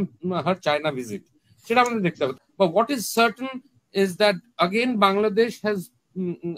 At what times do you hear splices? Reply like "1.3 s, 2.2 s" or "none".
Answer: 2.3 s